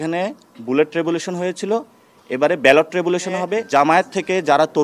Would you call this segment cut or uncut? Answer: cut